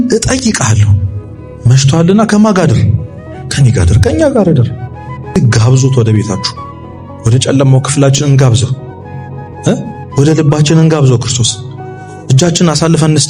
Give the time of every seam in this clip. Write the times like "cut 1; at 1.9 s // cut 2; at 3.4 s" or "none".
cut 1; at 5.4 s

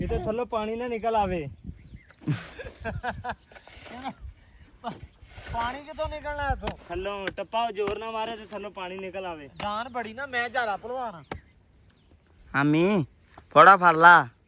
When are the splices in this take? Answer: none

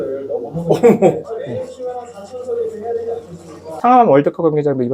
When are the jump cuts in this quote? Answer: cut 1; at 3.7 s

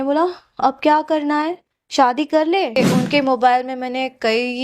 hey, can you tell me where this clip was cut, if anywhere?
cut 1; at 2.8 s

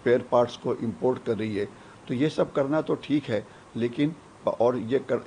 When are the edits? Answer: none

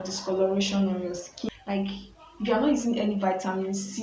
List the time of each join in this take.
cut 1; at 1.3 s

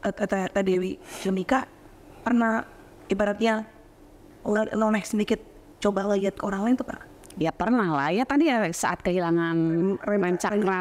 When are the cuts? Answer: none

